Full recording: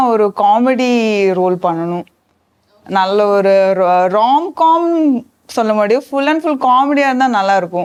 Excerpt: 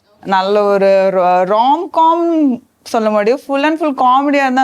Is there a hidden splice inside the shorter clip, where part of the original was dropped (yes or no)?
no